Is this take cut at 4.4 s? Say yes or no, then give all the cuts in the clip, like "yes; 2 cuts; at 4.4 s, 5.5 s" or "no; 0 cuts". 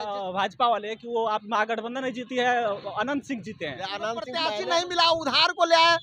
yes; 1 cut; at 4.4 s